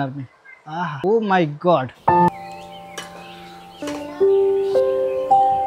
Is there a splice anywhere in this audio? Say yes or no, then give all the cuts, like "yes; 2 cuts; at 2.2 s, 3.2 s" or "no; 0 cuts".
yes; 3 cuts; at 0.9 s, 2.3 s, 3.8 s